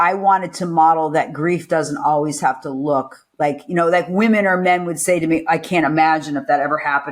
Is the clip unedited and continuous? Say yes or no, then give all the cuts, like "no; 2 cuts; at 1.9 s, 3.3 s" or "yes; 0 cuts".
yes; 0 cuts